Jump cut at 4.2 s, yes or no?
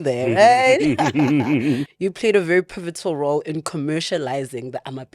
no